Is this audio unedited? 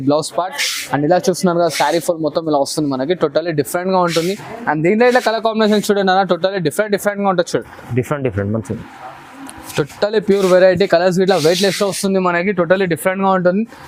yes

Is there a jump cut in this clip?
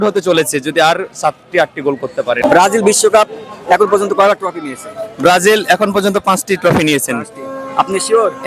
yes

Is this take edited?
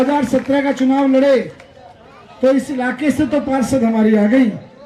no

